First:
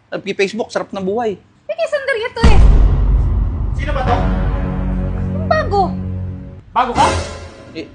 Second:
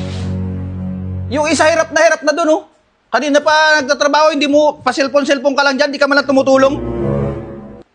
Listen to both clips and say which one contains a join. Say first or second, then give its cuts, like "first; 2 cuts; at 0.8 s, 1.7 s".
second; 1 cut; at 1.2 s